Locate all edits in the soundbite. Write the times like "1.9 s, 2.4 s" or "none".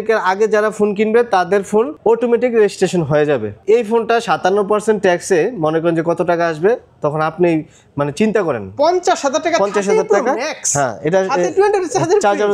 1.9 s, 3.5 s, 8.7 s